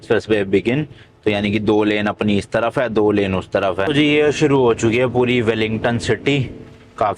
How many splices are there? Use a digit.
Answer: 1